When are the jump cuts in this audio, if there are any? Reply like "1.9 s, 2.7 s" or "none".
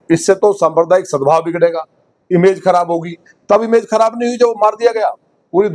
none